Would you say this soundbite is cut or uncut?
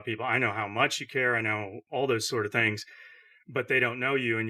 uncut